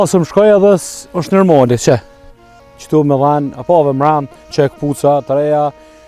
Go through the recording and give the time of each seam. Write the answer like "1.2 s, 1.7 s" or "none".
none